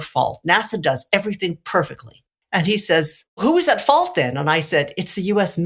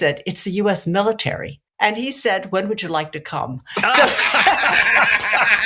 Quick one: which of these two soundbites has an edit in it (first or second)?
first